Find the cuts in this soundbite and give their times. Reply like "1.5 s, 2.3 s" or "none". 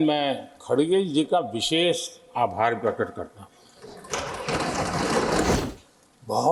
5.5 s